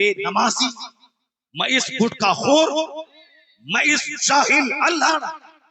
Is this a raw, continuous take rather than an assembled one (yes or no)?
yes